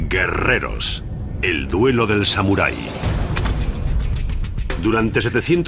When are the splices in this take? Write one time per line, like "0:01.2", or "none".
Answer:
0:04.2